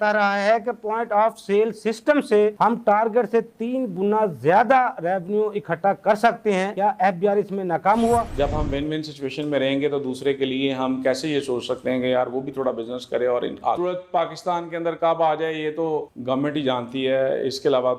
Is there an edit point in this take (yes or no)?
yes